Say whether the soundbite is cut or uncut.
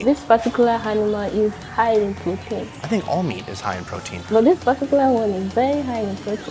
cut